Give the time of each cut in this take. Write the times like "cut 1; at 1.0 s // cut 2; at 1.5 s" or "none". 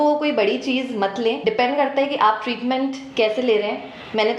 cut 1; at 1.4 s

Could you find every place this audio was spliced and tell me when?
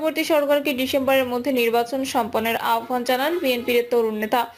none

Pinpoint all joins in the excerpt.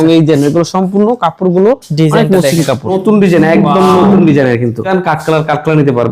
cut 1; at 3.0 s // cut 2; at 4.9 s

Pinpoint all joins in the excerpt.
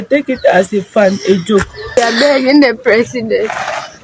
cut 1; at 2.0 s

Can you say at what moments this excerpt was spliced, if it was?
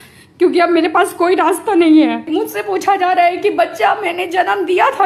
cut 1; at 2.3 s

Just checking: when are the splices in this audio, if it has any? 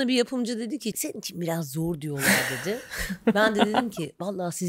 cut 1; at 1.0 s

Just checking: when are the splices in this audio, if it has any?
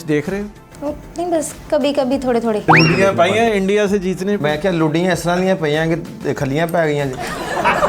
cut 1; at 2.6 s

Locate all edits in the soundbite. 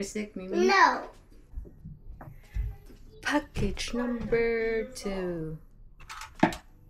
cut 1; at 1.6 s

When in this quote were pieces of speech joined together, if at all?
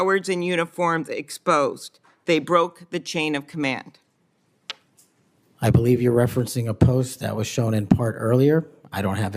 none

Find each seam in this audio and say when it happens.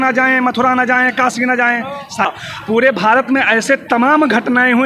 cut 1; at 2.3 s

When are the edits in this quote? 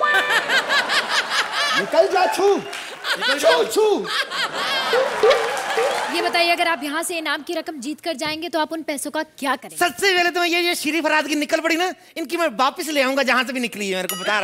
cut 1; at 6.1 s

